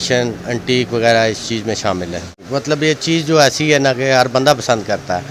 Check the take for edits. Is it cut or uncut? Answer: cut